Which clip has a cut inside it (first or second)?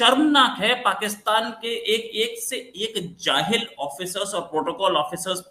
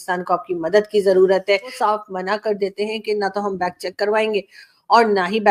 second